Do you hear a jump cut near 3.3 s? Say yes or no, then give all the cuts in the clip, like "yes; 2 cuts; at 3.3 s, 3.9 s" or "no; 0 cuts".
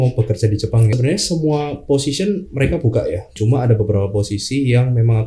yes; 2 cuts; at 0.9 s, 3.3 s